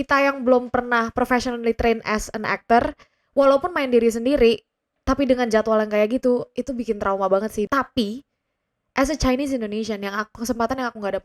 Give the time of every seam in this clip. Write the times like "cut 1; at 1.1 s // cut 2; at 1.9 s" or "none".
cut 1; at 7.7 s